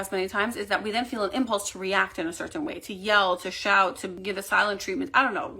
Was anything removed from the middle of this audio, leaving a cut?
yes; 1 cut; at 4.2 s

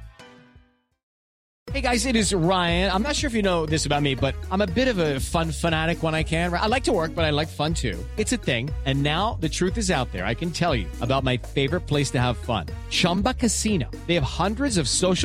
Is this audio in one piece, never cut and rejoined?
no; 1 cut; at 1.5 s

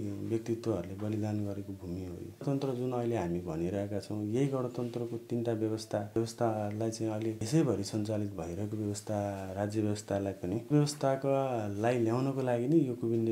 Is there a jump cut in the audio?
yes; 4 cuts; at 2.4 s, 6.2 s, 7.4 s, 10.7 s

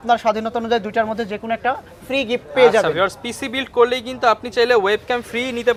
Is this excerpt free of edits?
yes; 0 cuts

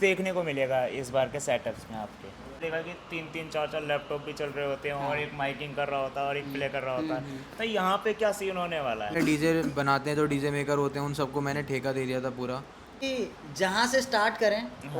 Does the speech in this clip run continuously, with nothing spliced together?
no; 3 cuts; at 2.6 s, 9.1 s, 13.0 s

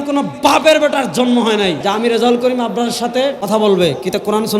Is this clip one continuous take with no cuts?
no; 2 cuts; at 1.8 s, 3.4 s

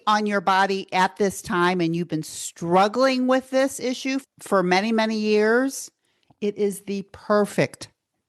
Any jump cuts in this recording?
yes; 1 cut; at 4.3 s

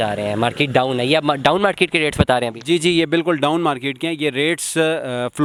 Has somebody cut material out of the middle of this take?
no; 0 cuts

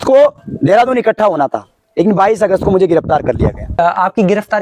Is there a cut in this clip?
no; 0 cuts

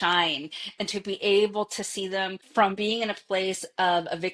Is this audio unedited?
no; 1 cut; at 2.4 s

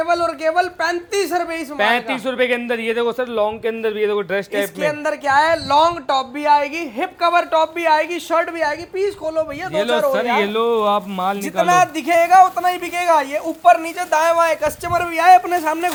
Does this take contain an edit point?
no; 0 cuts

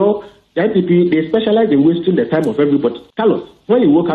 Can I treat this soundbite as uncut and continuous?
no; 1 cut; at 3.1 s

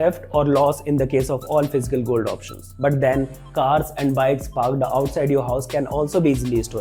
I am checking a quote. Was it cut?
no; 0 cuts

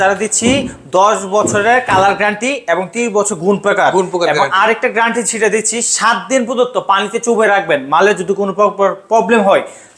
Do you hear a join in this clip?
no; 0 cuts

